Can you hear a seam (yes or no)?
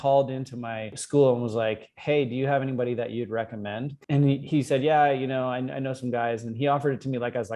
yes